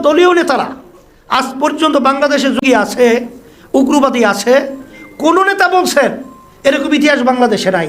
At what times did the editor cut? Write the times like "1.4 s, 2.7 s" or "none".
2.6 s